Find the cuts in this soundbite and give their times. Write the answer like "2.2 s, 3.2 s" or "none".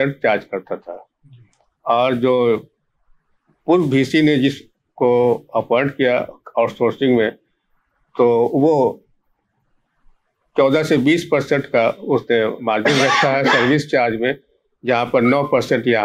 none